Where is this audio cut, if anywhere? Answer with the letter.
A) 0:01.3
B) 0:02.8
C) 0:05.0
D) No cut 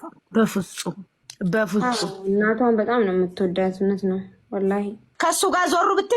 C